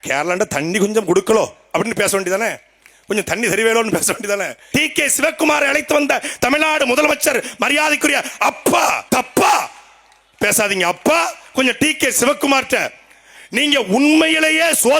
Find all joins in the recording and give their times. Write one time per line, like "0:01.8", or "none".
0:04.6
0:09.0